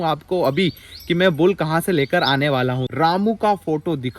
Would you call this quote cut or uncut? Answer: cut